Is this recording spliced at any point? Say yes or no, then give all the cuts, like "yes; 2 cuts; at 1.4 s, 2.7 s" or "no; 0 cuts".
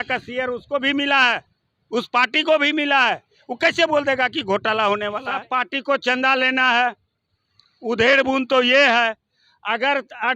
yes; 1 cut; at 5.3 s